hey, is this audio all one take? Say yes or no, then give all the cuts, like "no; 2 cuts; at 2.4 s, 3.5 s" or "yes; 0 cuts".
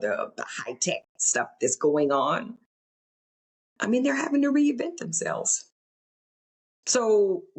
yes; 0 cuts